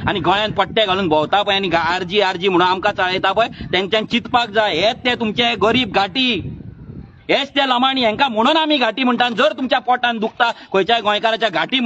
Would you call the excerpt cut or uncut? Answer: uncut